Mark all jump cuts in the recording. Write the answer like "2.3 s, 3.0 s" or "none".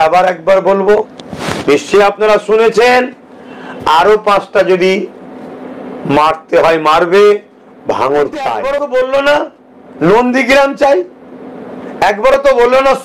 8.6 s